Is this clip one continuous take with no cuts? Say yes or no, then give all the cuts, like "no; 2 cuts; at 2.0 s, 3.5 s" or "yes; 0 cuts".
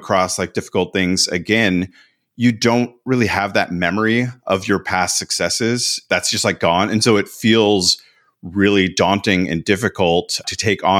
yes; 0 cuts